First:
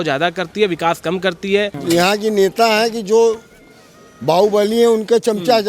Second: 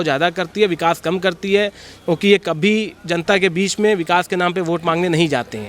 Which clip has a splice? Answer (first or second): first